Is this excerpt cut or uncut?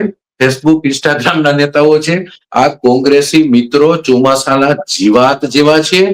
cut